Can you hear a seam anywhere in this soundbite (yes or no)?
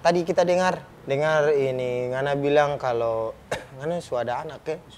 yes